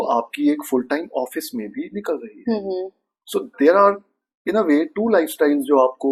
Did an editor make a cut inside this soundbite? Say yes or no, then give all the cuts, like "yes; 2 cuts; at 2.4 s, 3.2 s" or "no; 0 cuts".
no; 0 cuts